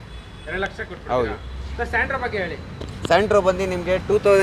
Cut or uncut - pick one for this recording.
uncut